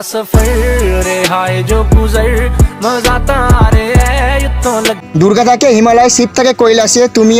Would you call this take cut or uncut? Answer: cut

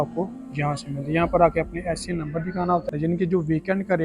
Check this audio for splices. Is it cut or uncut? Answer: cut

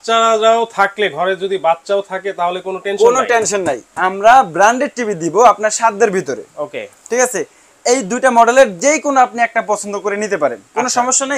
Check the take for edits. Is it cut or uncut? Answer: cut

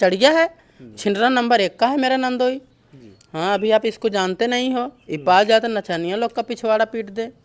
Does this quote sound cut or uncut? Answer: uncut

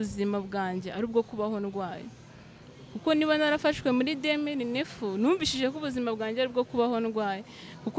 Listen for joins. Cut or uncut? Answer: uncut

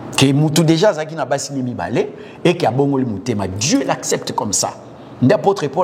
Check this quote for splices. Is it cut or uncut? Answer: uncut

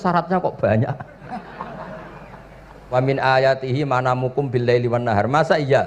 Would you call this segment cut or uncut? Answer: cut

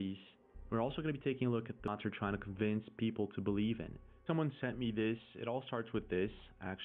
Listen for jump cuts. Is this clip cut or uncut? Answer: cut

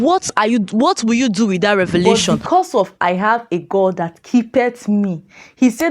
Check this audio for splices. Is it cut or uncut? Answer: cut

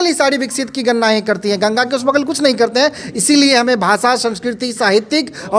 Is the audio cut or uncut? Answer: uncut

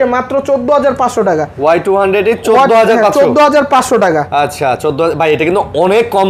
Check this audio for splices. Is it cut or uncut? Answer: uncut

